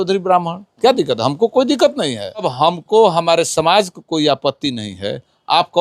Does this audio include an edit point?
yes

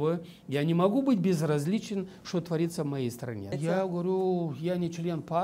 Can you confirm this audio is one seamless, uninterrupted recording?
no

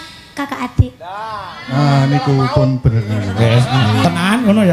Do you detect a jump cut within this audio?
no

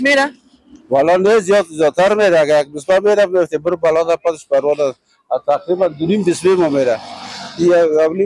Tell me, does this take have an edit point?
no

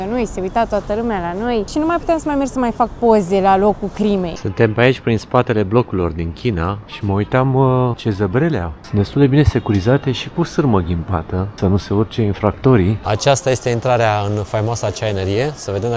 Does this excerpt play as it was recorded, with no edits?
no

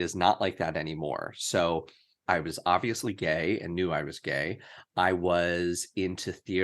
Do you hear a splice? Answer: yes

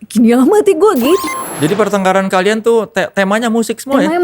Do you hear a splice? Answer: yes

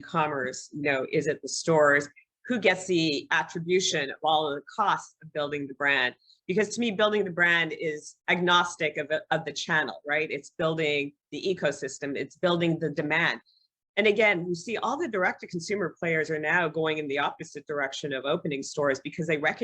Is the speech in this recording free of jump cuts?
no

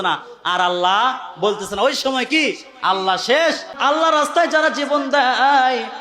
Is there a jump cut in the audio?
yes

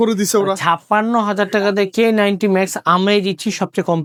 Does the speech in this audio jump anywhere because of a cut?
no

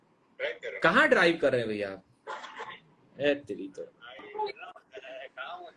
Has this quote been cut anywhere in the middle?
no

